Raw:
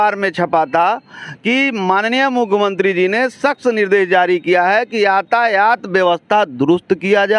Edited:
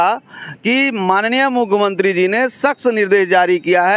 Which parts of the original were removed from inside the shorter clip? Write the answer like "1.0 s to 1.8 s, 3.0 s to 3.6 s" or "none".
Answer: none